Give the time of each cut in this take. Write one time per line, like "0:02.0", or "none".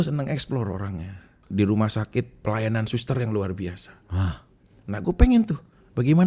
0:01.3